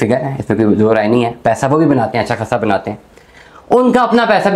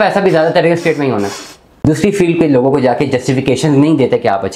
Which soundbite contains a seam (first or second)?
second